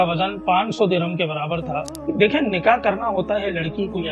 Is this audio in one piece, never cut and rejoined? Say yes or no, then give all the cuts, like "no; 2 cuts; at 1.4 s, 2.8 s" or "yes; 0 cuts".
no; 1 cut; at 1.9 s